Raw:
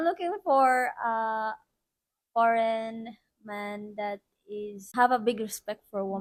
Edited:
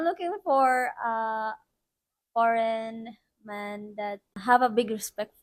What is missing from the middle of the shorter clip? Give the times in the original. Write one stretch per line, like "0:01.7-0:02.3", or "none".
0:04.3-0:04.8